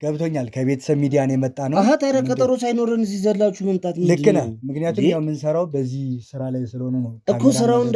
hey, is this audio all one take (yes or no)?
yes